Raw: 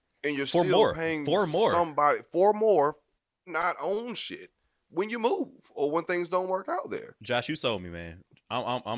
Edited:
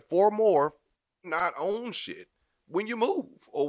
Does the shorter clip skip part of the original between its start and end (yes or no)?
no